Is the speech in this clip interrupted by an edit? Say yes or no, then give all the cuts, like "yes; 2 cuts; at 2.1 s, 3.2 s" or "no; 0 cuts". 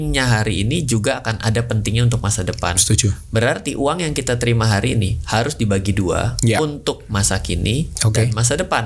no; 0 cuts